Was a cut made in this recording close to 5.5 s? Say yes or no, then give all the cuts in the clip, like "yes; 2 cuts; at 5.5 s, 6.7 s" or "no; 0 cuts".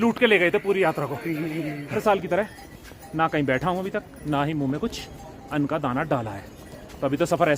no; 1 cut; at 1.8 s